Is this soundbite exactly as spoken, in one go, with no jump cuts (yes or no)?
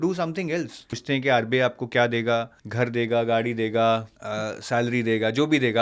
no